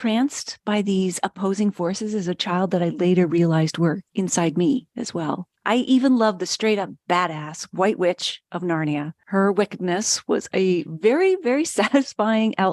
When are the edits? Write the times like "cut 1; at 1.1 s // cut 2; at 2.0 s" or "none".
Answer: none